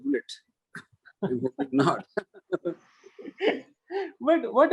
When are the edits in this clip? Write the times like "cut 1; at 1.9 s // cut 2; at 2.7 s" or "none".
none

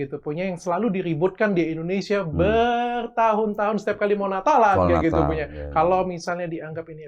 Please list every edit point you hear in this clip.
cut 1; at 5.6 s

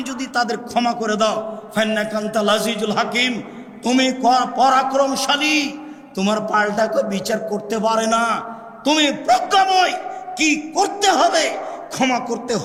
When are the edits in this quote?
none

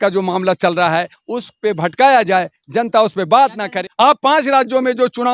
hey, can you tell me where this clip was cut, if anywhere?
cut 1; at 3.8 s

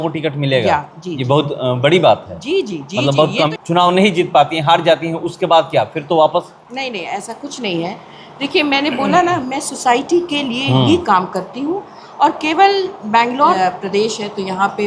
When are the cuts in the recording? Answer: cut 1; at 3.5 s // cut 2; at 13.6 s

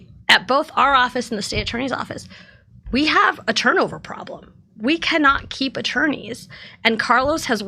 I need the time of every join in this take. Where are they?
none

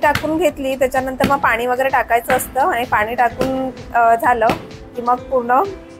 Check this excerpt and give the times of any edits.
none

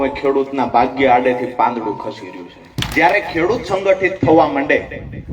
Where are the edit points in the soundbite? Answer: cut 1; at 2.7 s

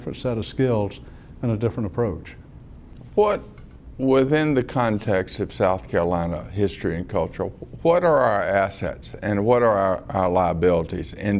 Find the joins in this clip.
cut 1; at 6.1 s

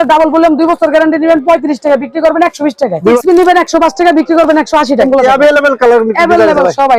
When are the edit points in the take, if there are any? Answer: cut 1; at 3.2 s // cut 2; at 5.1 s

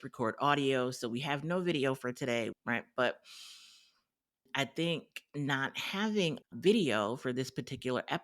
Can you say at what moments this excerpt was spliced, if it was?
cut 1; at 4.5 s

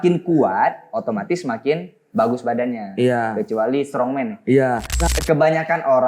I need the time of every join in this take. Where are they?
cut 1; at 5.1 s

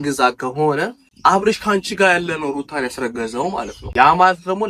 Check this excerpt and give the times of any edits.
cut 1; at 1.0 s // cut 2; at 3.8 s

